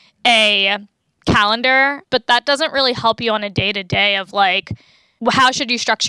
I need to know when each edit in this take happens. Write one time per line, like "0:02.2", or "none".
0:01.0
0:02.0